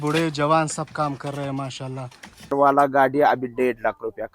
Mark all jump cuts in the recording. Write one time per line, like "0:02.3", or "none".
0:02.5